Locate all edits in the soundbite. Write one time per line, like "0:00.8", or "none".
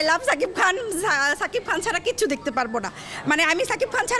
none